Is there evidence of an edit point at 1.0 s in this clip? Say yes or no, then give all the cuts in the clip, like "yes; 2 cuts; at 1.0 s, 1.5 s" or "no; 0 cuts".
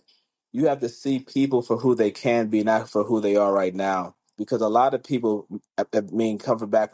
no; 1 cut; at 4.3 s